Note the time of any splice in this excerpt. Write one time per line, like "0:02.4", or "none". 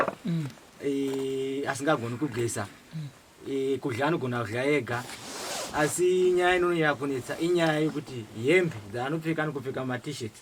none